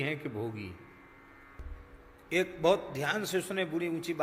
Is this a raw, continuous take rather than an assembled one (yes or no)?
no